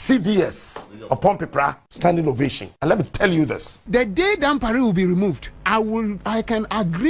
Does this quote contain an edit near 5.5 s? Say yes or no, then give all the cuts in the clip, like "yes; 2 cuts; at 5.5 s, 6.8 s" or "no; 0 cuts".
yes; 4 cuts; at 1.8 s, 2.7 s, 3.7 s, 5.5 s